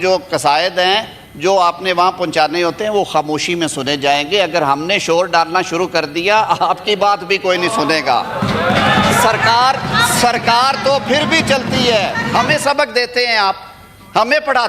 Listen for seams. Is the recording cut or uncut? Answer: cut